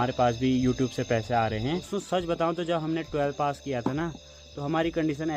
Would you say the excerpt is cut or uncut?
cut